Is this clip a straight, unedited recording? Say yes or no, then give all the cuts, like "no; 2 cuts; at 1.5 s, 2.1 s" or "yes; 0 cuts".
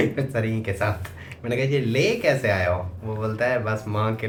yes; 0 cuts